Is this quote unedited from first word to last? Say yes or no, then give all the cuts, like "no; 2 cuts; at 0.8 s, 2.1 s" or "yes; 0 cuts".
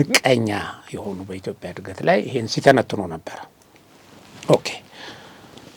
yes; 0 cuts